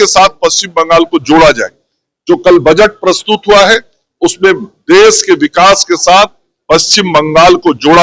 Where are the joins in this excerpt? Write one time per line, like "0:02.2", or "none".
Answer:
none